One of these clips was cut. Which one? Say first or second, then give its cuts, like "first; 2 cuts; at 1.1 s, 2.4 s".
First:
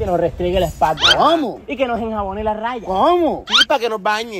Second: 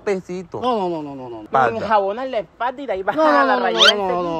second; 1 cut; at 1.5 s